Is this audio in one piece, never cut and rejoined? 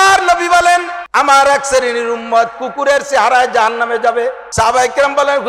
no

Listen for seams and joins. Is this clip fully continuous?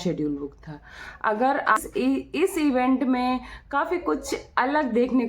no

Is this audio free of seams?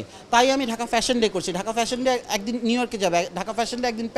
yes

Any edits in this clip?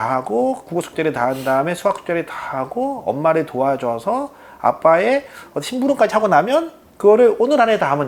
no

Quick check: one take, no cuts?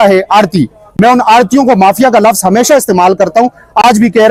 yes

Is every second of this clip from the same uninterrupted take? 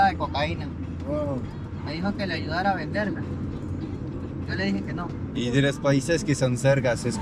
yes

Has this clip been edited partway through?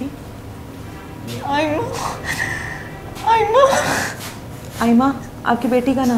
no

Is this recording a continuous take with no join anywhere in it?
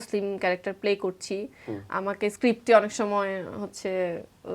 yes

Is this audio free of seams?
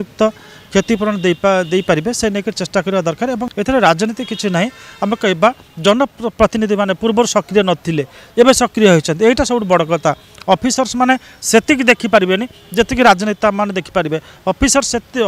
no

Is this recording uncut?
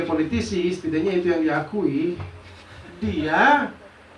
yes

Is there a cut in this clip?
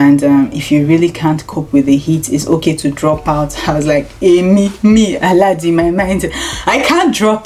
no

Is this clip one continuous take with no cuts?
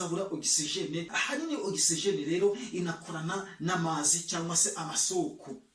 no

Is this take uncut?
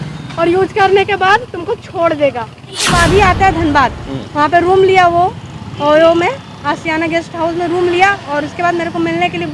no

